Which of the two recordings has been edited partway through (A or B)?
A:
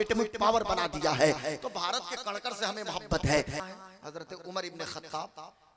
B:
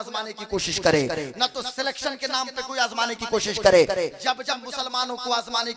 A